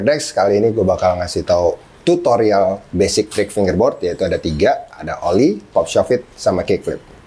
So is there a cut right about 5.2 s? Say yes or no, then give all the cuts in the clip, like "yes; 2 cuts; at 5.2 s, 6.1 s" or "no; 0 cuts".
no; 0 cuts